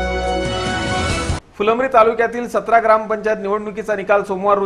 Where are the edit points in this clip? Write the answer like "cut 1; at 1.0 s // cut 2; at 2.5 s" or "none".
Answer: cut 1; at 1.4 s